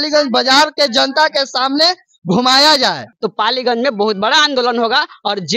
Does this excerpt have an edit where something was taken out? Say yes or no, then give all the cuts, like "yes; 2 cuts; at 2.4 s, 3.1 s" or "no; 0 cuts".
yes; 1 cut; at 3.1 s